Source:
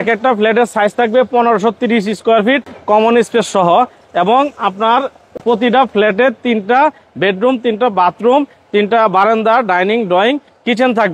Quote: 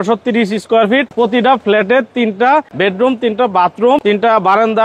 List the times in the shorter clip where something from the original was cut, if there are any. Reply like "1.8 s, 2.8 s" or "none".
1.1 s, 2.7 s, 4.0 s

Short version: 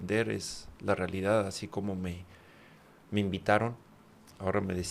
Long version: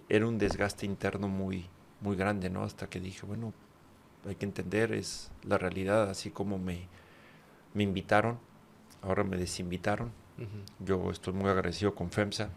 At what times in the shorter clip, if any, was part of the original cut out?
none

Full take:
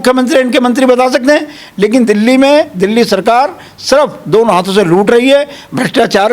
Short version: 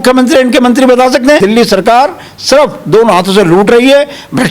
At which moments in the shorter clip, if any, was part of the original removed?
1.4 s

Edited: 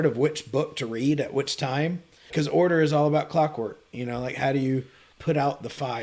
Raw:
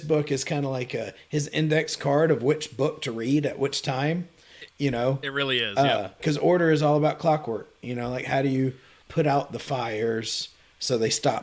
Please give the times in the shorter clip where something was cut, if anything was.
2.2 s

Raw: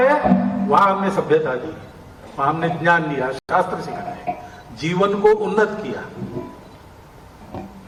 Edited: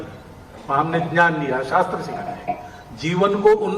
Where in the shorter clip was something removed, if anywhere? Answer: 1.7 s

